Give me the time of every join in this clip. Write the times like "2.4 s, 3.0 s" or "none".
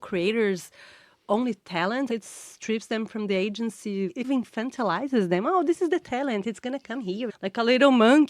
2.1 s, 4.2 s, 7.3 s